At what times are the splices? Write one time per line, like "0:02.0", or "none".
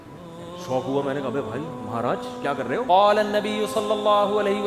0:02.9